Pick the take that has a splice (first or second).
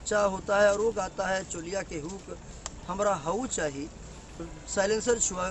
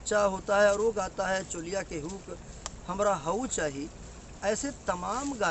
first